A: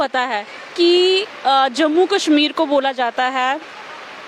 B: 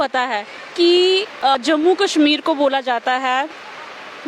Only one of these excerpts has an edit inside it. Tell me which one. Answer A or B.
B